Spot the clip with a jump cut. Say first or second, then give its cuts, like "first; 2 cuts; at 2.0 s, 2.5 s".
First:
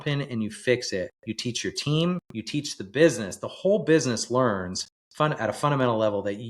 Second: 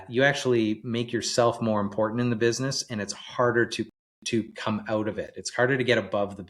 first; 2 cuts; at 1.2 s, 2.3 s